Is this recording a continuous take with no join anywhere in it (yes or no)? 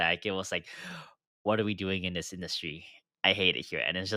yes